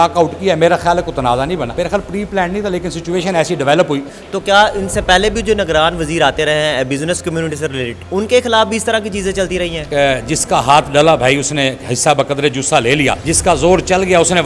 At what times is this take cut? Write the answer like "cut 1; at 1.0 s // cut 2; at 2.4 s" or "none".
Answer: cut 1; at 1.7 s // cut 2; at 4.2 s // cut 3; at 8.0 s // cut 4; at 9.8 s // cut 5; at 13.3 s